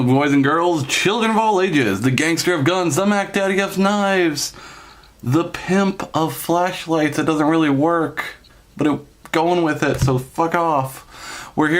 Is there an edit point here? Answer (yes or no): no